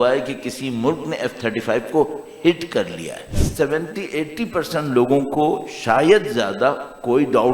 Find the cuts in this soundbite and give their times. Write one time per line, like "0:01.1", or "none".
0:03.4